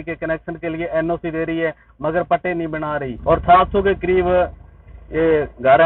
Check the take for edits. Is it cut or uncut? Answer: cut